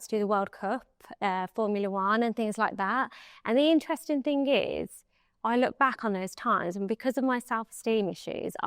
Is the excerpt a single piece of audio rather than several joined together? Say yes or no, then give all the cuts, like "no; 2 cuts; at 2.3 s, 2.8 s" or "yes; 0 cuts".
yes; 0 cuts